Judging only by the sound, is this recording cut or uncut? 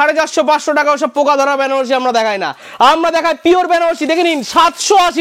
uncut